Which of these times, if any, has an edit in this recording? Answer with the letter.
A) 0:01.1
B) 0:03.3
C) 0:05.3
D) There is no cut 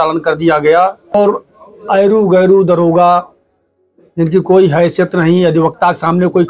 A